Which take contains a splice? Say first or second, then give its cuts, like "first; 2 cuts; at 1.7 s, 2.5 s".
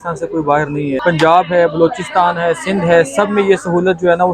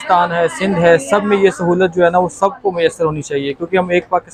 first; 1 cut; at 1.0 s